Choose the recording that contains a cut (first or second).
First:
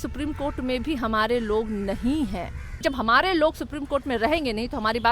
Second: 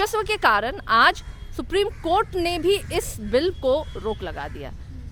first